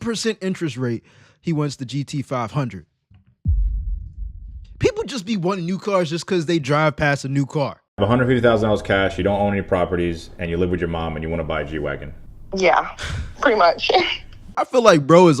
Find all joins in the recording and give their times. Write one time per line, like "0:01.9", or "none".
0:07.8
0:14.5